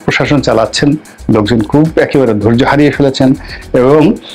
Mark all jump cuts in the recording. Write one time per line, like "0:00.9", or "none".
none